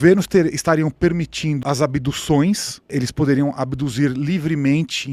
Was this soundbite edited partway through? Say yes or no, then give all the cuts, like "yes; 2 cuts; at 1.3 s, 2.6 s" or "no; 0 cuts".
yes; 2 cuts; at 1.6 s, 2.9 s